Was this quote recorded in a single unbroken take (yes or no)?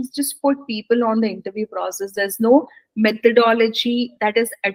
yes